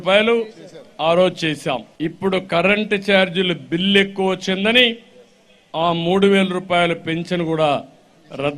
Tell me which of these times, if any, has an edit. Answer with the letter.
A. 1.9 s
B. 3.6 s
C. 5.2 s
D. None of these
A